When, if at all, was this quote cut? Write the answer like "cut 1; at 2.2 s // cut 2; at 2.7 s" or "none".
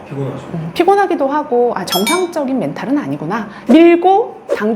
cut 1; at 3.5 s